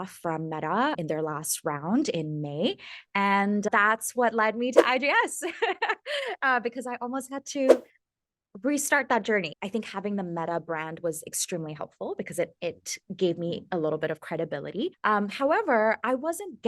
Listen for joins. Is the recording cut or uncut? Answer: cut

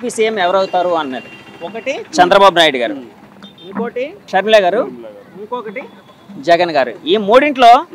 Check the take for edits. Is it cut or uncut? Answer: cut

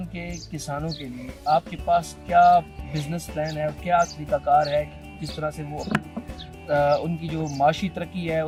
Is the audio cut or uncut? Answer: uncut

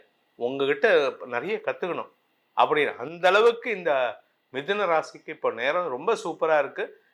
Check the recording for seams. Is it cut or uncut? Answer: uncut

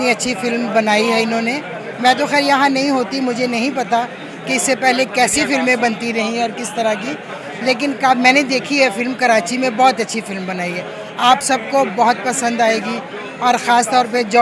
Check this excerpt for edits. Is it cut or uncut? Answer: uncut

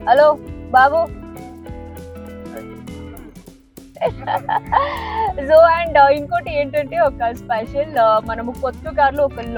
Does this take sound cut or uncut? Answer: uncut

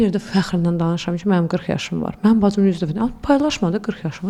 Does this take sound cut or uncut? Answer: uncut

